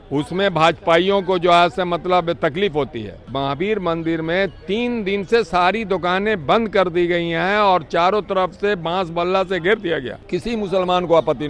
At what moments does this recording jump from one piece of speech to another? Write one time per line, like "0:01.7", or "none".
0:03.2
0:10.2